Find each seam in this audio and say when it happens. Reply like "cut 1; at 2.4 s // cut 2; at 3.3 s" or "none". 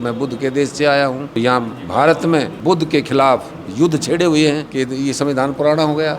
cut 1; at 1.4 s // cut 2; at 2.5 s // cut 3; at 4.7 s